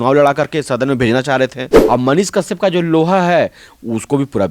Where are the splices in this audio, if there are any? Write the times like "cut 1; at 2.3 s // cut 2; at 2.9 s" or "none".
cut 1; at 1.7 s